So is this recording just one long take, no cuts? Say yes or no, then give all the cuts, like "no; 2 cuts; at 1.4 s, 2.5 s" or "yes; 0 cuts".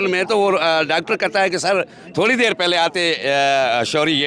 yes; 0 cuts